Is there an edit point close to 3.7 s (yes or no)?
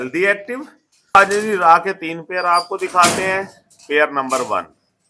no